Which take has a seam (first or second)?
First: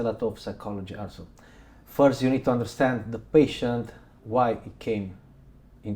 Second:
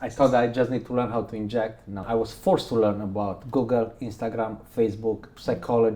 second